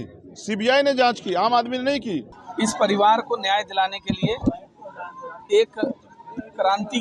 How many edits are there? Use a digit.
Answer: 1